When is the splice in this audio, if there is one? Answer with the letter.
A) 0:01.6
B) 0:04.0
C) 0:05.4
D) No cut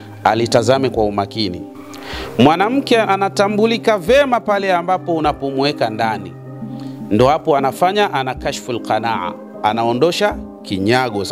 A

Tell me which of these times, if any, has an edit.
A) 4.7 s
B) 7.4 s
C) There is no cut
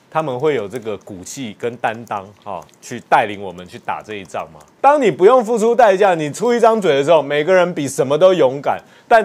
A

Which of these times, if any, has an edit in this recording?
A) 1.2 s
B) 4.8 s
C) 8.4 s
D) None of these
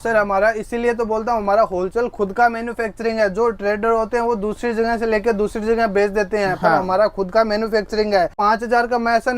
C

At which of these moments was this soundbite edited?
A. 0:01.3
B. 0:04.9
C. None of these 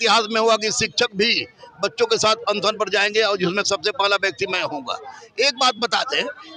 C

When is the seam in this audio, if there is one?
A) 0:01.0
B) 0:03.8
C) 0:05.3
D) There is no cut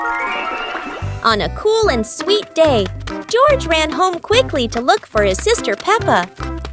A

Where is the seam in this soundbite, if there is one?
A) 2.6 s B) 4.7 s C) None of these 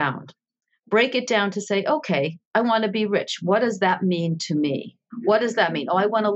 C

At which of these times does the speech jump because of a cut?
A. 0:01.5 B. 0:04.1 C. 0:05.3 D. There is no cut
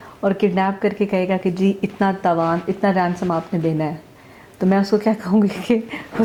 D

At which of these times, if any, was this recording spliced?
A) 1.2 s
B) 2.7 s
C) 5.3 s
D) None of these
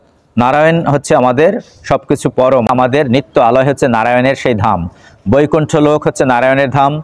B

